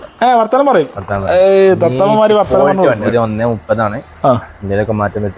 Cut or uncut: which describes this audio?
cut